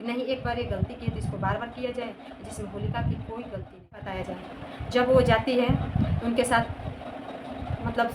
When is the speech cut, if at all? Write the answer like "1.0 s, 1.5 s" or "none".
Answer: 4.1 s